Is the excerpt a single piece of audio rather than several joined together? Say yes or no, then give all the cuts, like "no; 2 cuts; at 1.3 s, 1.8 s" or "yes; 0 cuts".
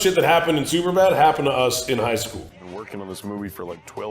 no; 1 cut; at 2.4 s